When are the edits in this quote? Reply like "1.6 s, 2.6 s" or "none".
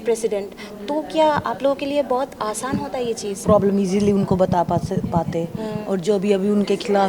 3.4 s